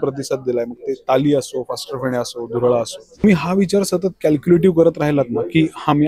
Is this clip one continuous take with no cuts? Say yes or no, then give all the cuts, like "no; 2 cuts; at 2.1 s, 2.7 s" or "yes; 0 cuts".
no; 1 cut; at 3.2 s